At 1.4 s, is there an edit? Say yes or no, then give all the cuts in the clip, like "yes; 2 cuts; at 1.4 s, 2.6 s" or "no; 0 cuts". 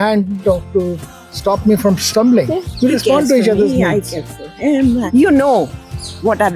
no; 2 cuts; at 2.7 s, 5.1 s